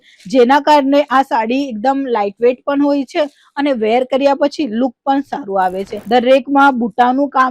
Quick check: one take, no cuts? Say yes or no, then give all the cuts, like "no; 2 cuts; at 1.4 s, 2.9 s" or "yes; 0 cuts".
no; 1 cut; at 5.9 s